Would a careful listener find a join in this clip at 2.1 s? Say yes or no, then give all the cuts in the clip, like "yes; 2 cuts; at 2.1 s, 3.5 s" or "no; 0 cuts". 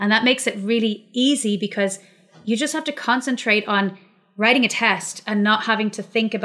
no; 0 cuts